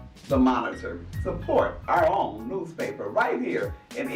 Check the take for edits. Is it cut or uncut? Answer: uncut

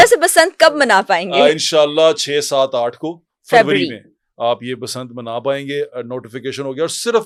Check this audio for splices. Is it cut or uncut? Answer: uncut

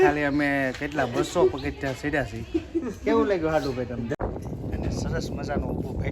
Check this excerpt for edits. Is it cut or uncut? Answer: cut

